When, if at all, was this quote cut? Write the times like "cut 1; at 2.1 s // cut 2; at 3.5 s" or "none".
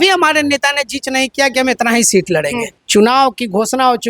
cut 1; at 2.7 s